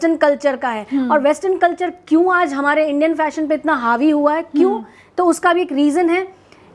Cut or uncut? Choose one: uncut